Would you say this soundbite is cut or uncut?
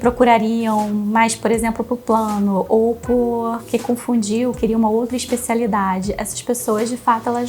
uncut